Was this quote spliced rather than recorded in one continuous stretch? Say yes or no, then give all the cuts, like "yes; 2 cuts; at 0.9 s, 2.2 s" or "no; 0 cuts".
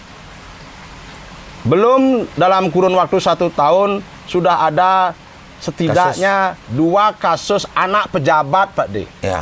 no; 0 cuts